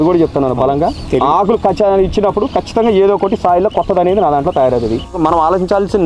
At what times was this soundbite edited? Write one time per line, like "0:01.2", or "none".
0:05.1